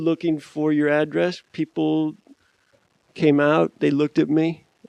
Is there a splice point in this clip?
yes; 1 cut; at 3.0 s

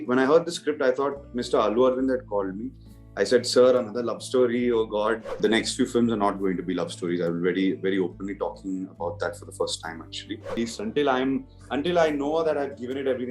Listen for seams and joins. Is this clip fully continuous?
no; 2 cuts; at 5.4 s, 10.5 s

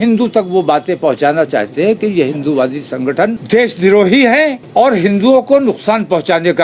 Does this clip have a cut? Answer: yes; 2 cuts; at 3.4 s, 4.6 s

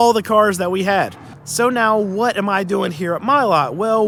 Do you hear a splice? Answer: no; 0 cuts

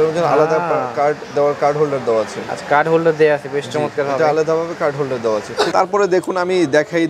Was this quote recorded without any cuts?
no; 1 cut; at 5.7 s

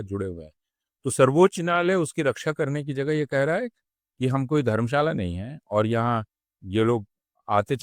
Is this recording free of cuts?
yes; 0 cuts

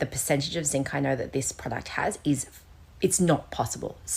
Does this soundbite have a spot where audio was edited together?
no; 0 cuts

